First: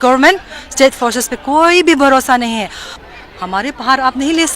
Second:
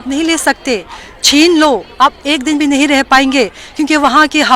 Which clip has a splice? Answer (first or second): first